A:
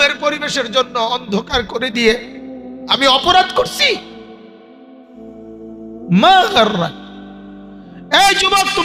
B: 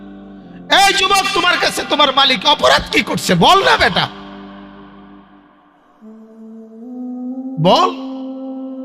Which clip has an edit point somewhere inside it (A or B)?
B